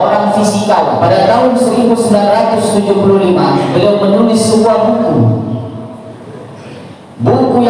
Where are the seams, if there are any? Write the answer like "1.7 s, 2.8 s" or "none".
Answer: 1.0 s